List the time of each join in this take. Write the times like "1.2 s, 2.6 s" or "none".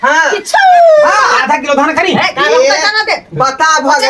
1.0 s